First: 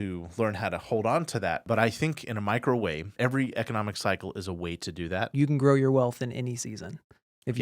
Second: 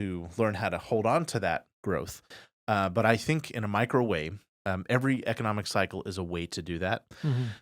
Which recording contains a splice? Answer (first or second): first